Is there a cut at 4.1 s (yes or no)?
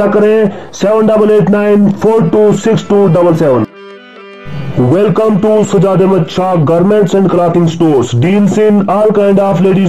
no